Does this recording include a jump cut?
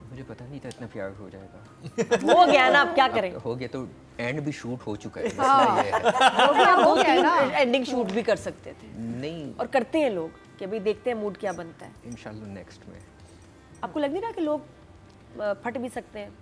no; 0 cuts

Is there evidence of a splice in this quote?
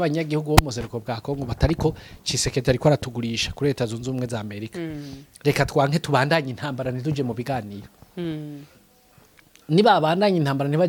no; 0 cuts

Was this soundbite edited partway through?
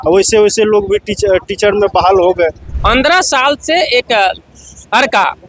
yes; 1 cut; at 2.7 s

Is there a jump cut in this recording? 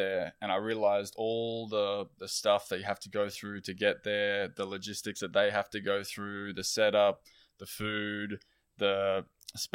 no; 0 cuts

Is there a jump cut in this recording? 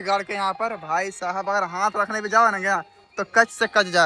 no; 0 cuts

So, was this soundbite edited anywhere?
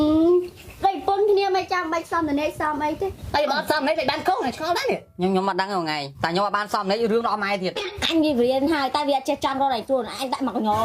yes; 2 cuts; at 6.1 s, 7.9 s

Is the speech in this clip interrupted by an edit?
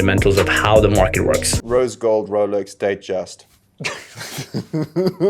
yes; 1 cut; at 1.5 s

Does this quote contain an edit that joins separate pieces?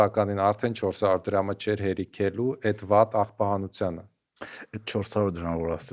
no; 0 cuts

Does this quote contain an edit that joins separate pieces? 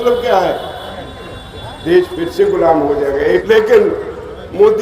yes; 1 cut; at 3.4 s

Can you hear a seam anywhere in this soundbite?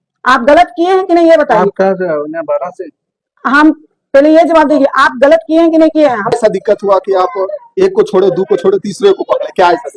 no; 0 cuts

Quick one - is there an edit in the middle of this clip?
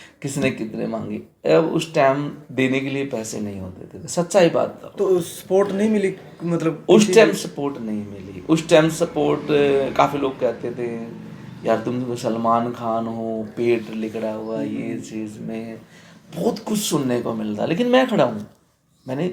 no; 0 cuts

